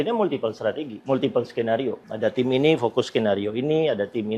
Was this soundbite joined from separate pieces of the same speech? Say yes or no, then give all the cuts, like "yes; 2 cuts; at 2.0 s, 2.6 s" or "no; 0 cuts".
yes; 2 cuts; at 0.9 s, 2.1 s